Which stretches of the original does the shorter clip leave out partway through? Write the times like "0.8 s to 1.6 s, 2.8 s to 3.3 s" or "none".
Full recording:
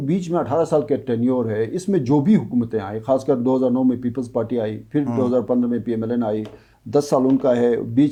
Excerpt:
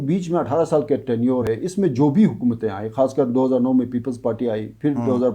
1.5 s to 1.6 s